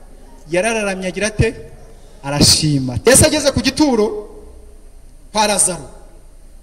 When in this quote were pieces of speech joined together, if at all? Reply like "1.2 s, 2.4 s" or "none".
3.1 s